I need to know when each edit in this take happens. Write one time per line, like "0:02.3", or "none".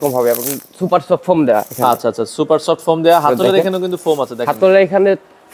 none